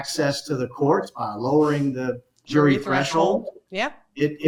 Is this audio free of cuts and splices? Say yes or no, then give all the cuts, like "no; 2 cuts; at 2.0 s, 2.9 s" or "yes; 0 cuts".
yes; 0 cuts